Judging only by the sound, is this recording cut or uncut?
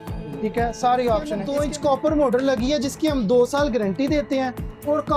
cut